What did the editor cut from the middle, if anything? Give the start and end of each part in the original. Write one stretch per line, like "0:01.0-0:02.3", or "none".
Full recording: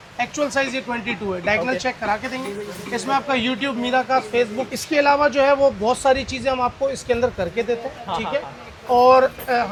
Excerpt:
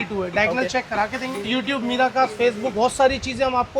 0:02.6-0:03.4
0:04.7-0:05.8